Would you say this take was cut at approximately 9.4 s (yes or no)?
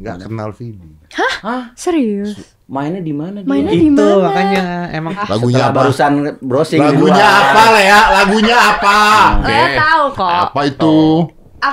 yes